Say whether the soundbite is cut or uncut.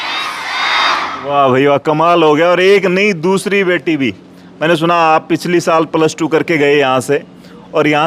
uncut